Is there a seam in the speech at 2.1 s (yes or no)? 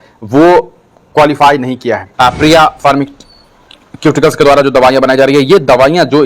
yes